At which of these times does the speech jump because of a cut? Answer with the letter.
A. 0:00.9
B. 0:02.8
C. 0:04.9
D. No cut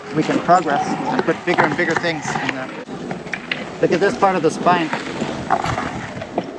B